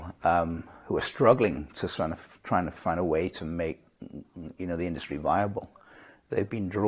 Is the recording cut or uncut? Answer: uncut